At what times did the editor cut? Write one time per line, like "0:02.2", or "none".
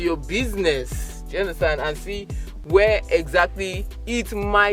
none